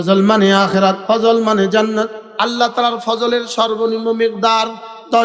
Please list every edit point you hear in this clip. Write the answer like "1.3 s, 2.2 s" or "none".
1.0 s, 2.2 s